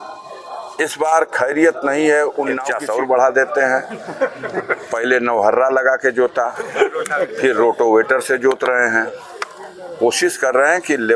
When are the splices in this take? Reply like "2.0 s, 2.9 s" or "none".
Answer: 2.6 s